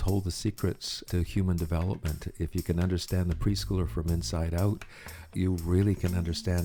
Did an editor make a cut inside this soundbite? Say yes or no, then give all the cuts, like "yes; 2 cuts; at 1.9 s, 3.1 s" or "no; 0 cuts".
no; 0 cuts